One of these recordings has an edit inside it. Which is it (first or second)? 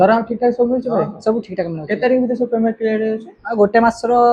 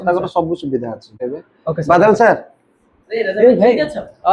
second